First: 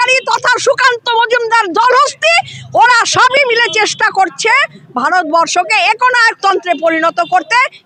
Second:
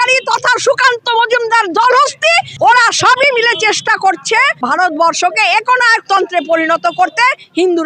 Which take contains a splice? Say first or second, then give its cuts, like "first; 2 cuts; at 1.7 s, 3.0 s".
second; 2 cuts; at 2.5 s, 4.5 s